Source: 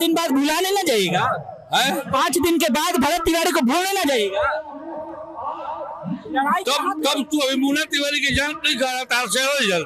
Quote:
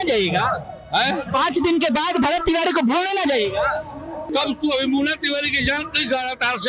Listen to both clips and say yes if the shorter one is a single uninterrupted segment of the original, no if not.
no